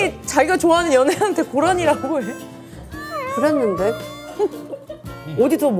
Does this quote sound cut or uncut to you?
uncut